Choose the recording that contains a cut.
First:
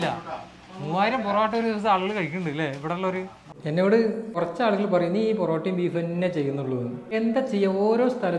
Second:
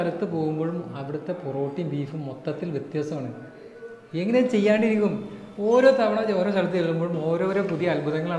first; 3 cuts; at 3.4 s, 4.3 s, 7.1 s

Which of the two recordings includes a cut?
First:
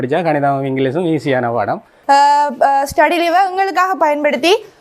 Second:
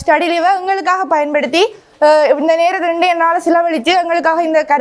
first; 1 cut; at 1.9 s

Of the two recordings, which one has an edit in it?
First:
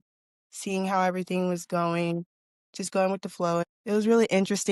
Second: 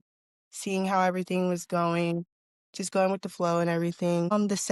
first; 1 cut; at 3.6 s

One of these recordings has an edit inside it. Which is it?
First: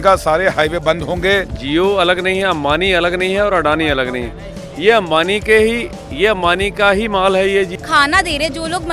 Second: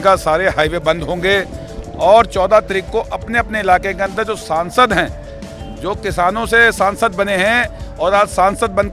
first; 2 cuts; at 1.6 s, 7.7 s

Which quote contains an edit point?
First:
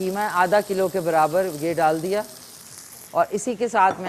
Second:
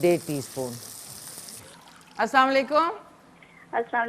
second; 1 cut; at 1.6 s

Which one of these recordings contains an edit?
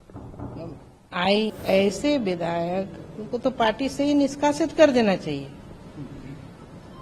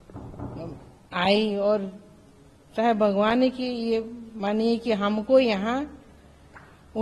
first; 1 cut; at 1.5 s

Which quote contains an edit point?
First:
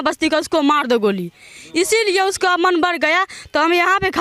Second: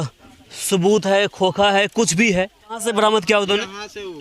second; 1 cut; at 2.8 s

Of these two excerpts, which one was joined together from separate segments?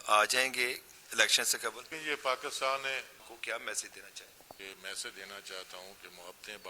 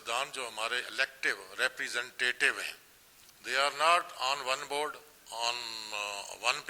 first; 3 cuts; at 2.0 s, 3.2 s, 4.6 s

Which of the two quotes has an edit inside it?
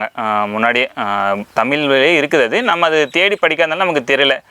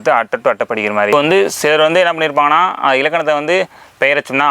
second; 1 cut; at 1.1 s

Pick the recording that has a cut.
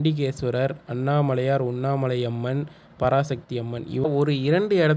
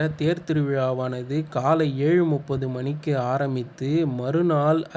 first; 1 cut; at 4.1 s

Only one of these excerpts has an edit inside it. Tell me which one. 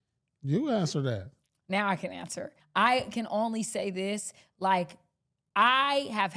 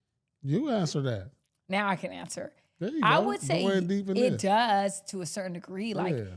first; 1 cut; at 2.6 s

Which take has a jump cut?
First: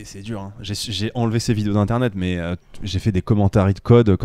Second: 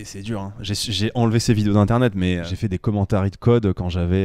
second; 1 cut; at 2.5 s

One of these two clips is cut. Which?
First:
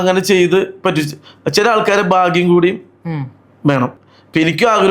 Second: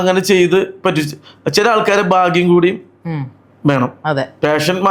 first; 1 cut; at 4.0 s

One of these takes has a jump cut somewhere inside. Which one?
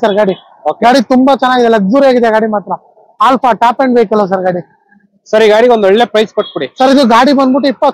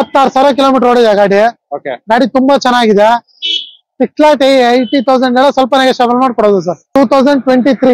second; 1 cut; at 6.9 s

